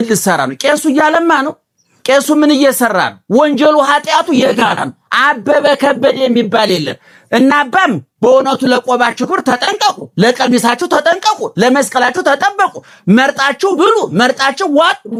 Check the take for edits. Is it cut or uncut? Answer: uncut